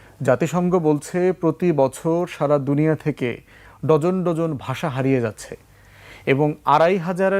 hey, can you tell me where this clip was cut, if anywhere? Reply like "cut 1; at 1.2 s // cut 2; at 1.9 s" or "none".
none